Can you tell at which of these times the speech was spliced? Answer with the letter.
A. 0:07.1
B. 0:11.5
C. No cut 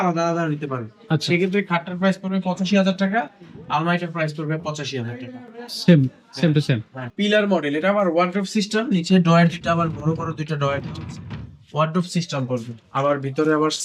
A